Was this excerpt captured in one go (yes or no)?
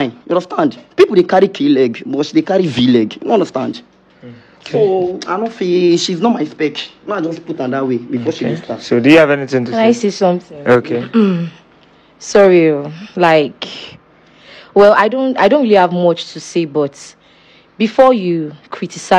yes